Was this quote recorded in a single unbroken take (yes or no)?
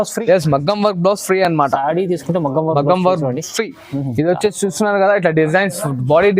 yes